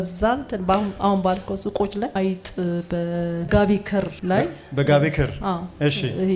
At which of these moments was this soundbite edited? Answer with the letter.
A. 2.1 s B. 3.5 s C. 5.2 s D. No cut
A